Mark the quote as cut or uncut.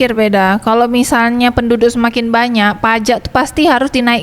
uncut